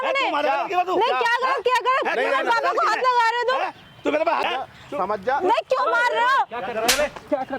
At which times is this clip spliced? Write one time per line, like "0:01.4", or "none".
0:04.4